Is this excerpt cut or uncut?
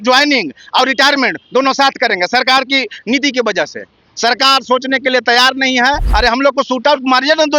cut